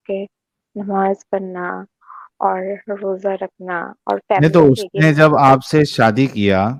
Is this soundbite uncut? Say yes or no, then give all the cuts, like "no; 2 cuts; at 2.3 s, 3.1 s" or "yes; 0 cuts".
yes; 0 cuts